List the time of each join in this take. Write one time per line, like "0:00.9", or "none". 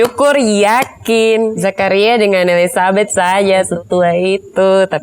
0:01.5
0:03.7